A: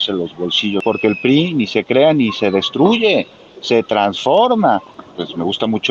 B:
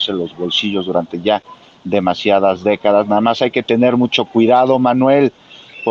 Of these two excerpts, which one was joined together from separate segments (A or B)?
A